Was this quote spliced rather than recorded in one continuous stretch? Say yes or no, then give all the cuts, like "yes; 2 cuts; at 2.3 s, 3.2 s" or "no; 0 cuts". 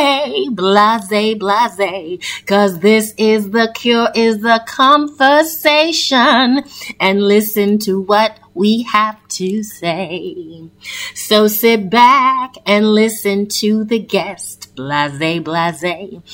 no; 0 cuts